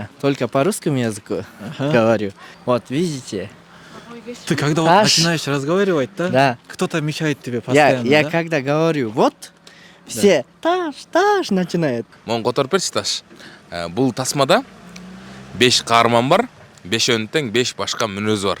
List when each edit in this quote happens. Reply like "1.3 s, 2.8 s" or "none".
2.5 s, 12.1 s